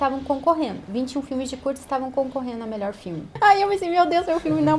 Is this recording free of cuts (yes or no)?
no